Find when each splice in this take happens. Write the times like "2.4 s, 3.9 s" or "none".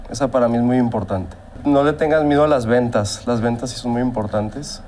1.5 s

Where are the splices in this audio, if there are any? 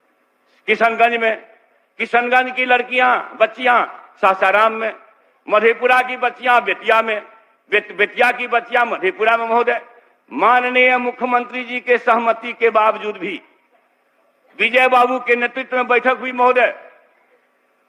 none

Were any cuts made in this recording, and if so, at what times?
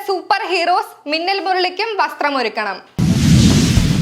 2.8 s

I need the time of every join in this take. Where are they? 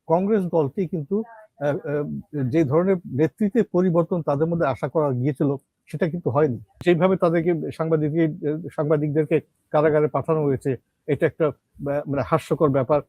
6.7 s

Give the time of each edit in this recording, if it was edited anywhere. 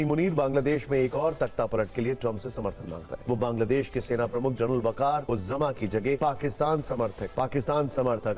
3.1 s, 5.2 s, 6.2 s

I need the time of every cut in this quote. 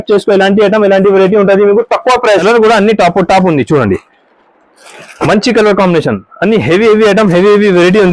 2.4 s

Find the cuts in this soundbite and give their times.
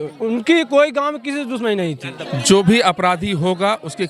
2.1 s

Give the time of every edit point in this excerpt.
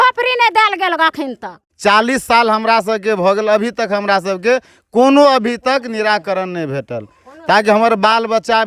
1.6 s

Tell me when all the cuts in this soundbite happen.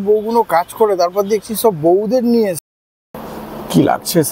2.6 s

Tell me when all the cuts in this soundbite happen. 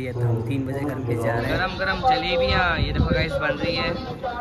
1.6 s

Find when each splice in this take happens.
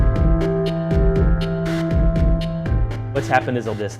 2.7 s

